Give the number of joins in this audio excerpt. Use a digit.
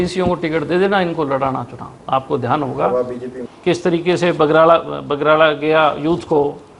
1